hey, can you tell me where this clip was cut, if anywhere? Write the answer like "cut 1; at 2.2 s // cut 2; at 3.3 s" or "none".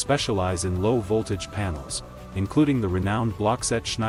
none